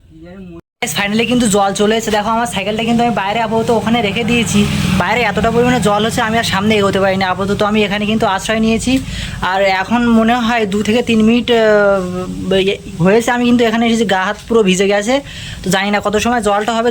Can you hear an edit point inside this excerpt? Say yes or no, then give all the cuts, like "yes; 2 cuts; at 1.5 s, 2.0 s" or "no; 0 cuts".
yes; 1 cut; at 1.0 s